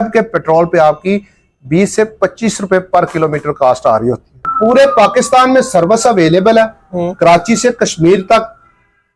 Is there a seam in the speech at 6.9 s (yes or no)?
no